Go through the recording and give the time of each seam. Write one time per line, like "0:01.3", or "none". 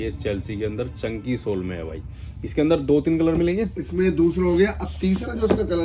none